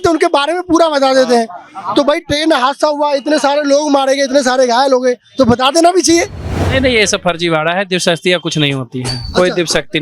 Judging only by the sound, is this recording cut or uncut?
cut